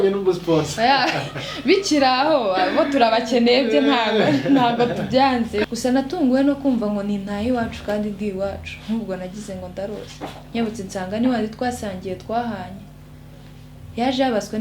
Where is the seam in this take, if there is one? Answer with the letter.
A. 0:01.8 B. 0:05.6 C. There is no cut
B